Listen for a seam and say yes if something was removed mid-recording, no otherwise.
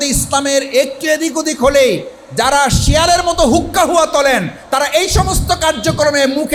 no